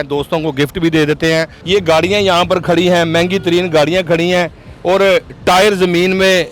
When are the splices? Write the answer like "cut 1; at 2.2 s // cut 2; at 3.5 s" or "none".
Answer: cut 1; at 1.6 s

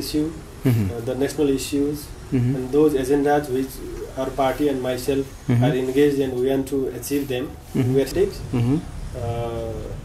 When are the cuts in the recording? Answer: cut 1; at 8.1 s

